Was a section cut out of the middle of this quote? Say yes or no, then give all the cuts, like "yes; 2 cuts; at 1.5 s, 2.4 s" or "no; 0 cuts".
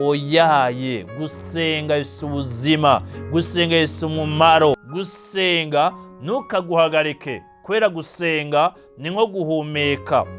yes; 1 cut; at 4.9 s